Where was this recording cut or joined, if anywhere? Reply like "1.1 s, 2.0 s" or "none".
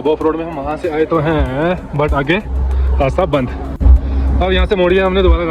none